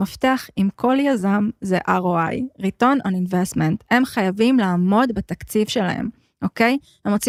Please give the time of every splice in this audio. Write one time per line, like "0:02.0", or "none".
none